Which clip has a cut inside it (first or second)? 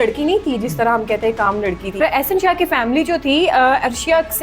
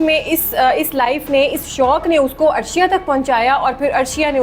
first